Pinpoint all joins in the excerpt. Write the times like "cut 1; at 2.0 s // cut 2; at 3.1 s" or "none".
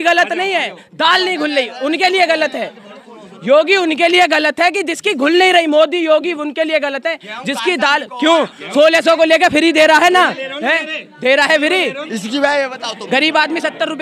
cut 1; at 12.1 s